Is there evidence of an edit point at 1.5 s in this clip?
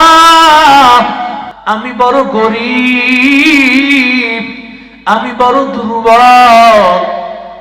yes; 1 cut; at 1.5 s

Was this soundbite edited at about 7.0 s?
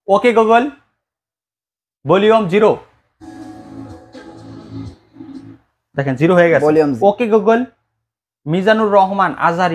yes; 1 cut; at 7.0 s

